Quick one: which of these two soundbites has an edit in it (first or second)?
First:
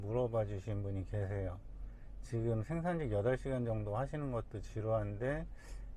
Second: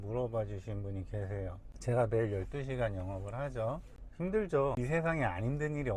second